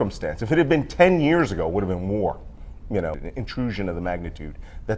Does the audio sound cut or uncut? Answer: cut